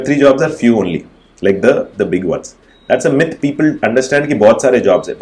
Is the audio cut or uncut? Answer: uncut